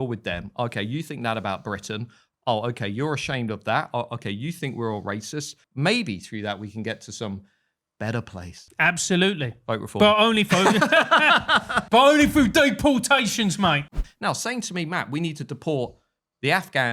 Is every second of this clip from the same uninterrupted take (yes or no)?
no